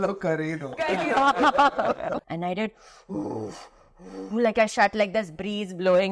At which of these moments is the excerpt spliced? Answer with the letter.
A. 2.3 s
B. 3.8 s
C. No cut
A